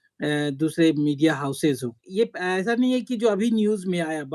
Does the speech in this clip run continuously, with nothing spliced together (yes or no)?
no